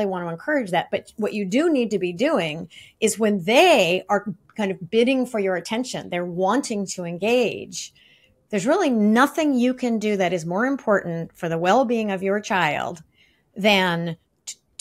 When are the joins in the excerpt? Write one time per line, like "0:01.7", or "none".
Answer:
none